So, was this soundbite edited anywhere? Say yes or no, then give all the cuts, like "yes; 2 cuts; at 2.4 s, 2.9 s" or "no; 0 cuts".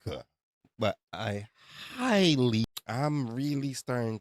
yes; 1 cut; at 2.8 s